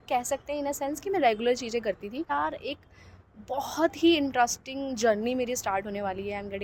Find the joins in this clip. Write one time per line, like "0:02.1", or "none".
0:02.3